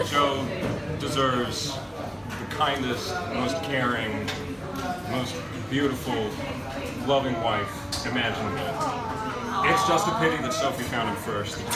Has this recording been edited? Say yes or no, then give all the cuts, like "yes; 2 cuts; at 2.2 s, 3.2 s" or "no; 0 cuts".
no; 0 cuts